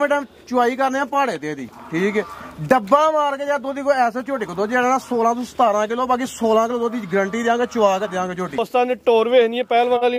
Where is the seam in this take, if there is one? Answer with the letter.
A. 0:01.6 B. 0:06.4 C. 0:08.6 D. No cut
C